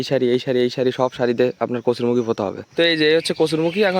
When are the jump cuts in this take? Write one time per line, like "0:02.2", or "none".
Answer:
0:02.6